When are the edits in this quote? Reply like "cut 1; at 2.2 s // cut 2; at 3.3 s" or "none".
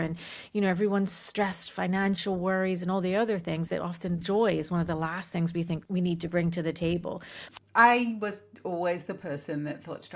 cut 1; at 5.8 s // cut 2; at 7.4 s